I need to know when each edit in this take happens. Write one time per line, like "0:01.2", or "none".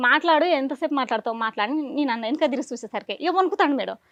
none